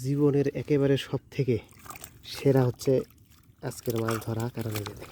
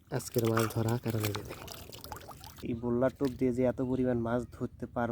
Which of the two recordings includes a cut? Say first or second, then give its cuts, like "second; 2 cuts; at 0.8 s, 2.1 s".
second; 1 cut; at 2.6 s